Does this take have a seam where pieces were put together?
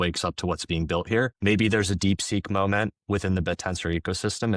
yes; 1 cut; at 1.3 s

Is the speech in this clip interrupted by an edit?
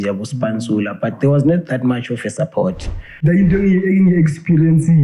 yes; 1 cut; at 3.2 s

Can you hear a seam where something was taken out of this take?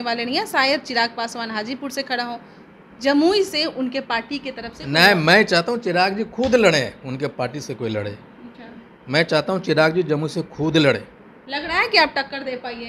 no; 0 cuts

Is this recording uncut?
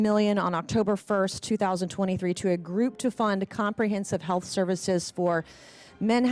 yes; 0 cuts

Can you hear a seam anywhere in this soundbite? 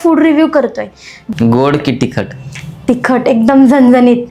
yes; 1 cut; at 1.3 s

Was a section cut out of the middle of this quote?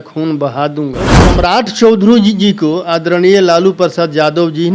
yes; 1 cut; at 1.1 s

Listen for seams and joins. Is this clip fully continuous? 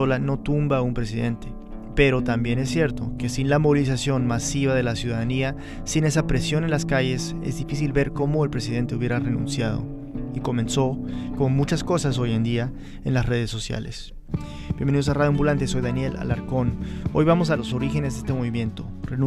no; 1 cut; at 9.9 s

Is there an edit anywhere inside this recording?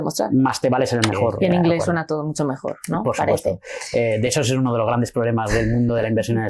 yes; 1 cut; at 1.3 s

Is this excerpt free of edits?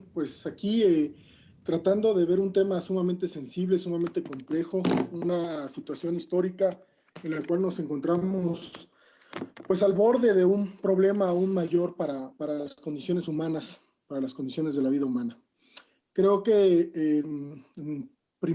yes; 0 cuts

